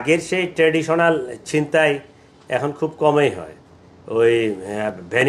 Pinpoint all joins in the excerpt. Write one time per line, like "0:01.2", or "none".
none